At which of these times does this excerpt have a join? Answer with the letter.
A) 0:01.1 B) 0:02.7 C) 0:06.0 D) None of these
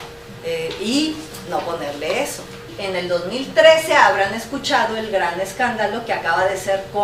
B